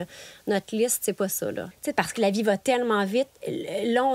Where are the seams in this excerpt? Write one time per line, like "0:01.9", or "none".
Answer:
0:01.7